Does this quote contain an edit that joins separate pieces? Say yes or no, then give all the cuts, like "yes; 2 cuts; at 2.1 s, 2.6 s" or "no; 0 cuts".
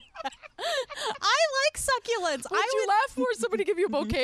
no; 0 cuts